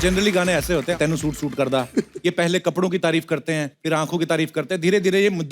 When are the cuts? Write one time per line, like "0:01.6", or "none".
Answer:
0:00.9
0:03.7